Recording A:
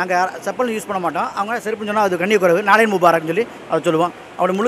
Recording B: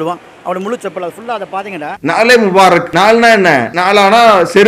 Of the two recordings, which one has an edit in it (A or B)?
B